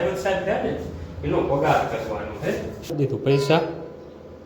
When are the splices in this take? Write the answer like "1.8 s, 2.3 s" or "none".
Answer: 2.9 s